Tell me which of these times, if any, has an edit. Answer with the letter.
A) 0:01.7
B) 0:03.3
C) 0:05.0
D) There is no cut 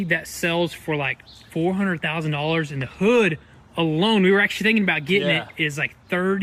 D